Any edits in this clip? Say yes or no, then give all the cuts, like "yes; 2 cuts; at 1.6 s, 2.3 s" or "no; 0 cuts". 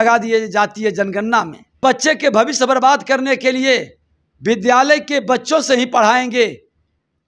yes; 1 cut; at 1.8 s